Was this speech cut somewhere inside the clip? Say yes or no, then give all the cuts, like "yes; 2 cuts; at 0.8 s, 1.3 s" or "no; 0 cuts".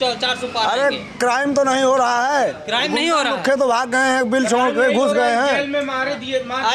no; 0 cuts